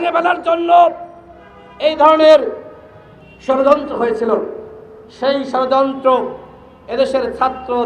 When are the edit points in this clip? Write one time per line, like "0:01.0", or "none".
none